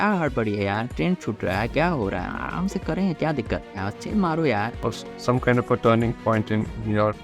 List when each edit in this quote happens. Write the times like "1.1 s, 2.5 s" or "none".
4.8 s